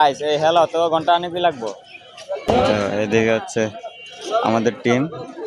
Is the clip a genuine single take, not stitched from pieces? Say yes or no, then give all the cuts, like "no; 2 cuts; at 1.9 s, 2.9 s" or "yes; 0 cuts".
no; 1 cut; at 2.4 s